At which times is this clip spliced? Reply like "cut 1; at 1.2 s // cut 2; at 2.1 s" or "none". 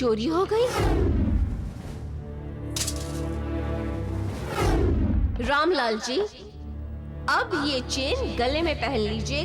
none